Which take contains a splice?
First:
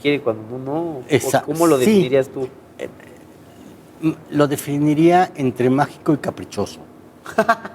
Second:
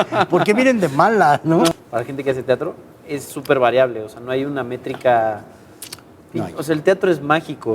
second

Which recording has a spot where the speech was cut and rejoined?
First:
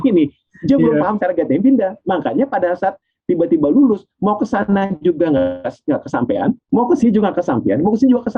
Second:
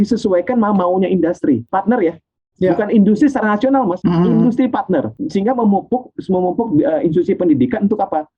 second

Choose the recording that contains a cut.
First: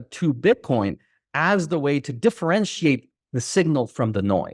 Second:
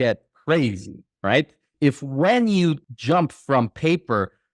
second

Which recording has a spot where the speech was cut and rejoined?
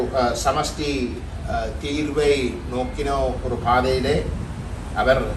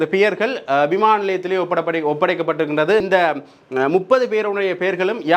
second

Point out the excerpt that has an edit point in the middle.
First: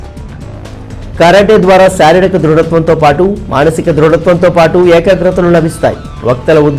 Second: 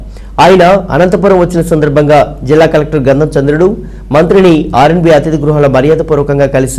first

